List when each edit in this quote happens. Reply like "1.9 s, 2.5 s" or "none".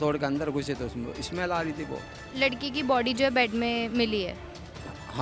2.2 s